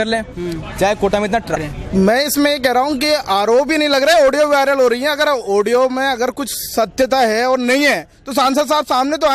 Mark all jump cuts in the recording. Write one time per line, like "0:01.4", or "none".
0:01.6